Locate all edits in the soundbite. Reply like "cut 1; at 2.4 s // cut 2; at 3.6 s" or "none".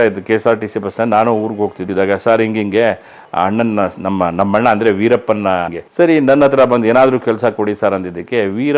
cut 1; at 1.8 s // cut 2; at 5.8 s